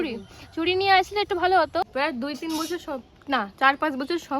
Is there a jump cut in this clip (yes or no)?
yes